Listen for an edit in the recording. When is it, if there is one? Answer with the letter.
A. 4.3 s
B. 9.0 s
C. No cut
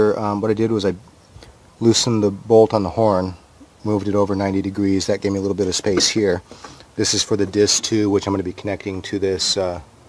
B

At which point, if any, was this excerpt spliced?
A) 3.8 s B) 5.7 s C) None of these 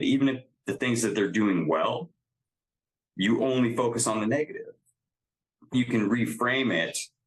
B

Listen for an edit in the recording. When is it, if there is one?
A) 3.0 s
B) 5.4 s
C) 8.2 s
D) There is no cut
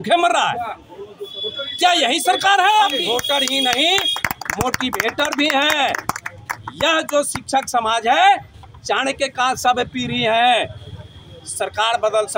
A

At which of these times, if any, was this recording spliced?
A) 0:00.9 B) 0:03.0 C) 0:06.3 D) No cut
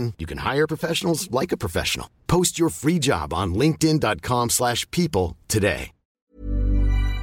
C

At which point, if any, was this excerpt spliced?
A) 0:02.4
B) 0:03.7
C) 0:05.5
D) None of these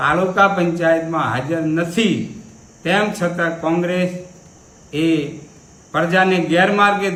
D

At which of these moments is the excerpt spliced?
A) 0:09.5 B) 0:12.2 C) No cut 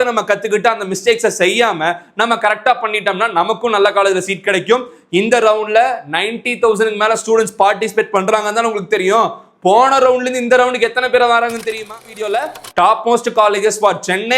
B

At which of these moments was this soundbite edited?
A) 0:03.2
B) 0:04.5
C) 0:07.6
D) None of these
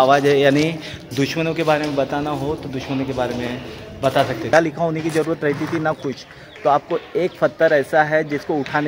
B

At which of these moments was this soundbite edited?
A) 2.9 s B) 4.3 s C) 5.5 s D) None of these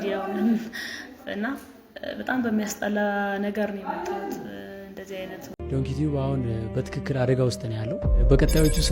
C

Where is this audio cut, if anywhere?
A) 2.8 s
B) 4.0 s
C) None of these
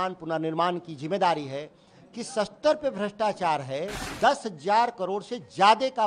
B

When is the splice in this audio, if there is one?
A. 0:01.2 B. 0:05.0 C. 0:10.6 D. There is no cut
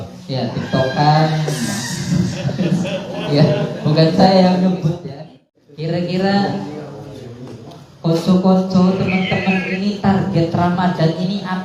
B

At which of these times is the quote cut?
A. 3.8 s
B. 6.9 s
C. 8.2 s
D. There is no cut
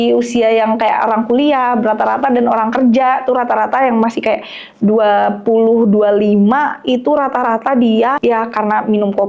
C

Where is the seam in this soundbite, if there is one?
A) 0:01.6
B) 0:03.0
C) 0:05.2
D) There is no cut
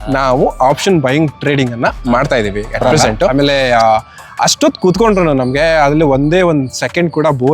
B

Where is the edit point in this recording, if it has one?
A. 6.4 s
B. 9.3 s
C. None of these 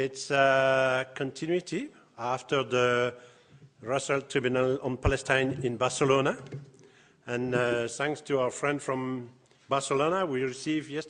B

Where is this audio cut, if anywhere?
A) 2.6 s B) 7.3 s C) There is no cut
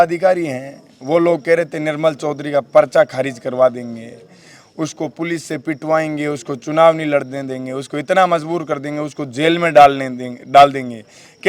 C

